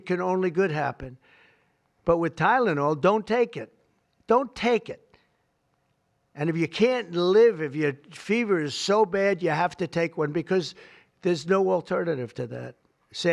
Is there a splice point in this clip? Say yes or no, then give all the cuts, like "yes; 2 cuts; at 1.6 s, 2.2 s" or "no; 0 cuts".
no; 0 cuts